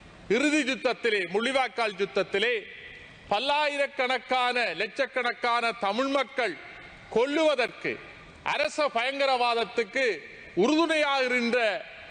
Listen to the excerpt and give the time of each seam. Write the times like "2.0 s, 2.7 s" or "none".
none